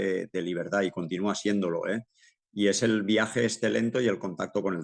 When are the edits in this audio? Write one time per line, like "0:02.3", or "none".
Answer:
none